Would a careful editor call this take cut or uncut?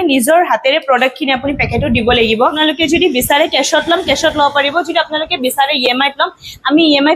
cut